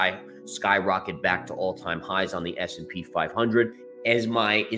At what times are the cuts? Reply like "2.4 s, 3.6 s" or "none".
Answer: 3.8 s